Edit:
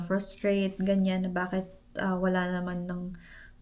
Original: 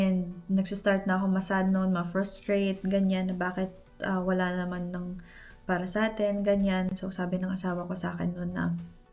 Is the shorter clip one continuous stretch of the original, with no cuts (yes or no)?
yes